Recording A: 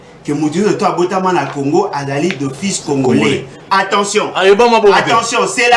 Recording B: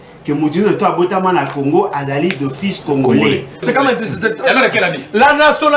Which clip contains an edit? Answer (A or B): B